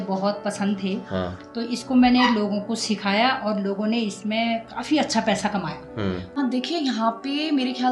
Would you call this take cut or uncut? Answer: cut